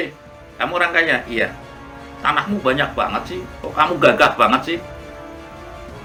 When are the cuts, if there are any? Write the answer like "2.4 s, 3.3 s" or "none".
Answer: none